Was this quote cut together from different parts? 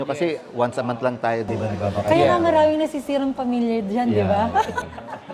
no; 0 cuts

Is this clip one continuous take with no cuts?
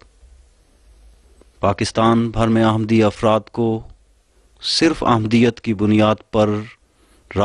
no; 1 cut; at 5.4 s

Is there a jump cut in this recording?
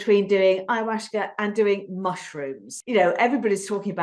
yes; 1 cut; at 2.7 s

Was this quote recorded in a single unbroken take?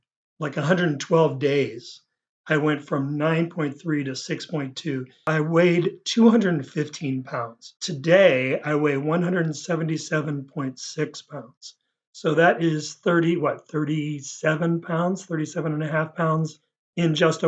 no; 1 cut; at 7.9 s

